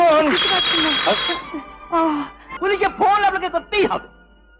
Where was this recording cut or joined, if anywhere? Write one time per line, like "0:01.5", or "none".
0:02.4